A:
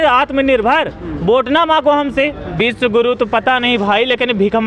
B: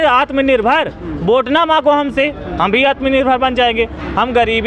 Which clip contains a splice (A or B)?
A